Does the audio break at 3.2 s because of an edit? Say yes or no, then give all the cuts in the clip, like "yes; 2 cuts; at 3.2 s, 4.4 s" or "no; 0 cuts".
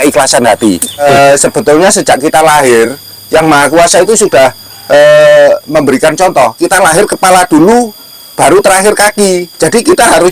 no; 1 cut; at 1.0 s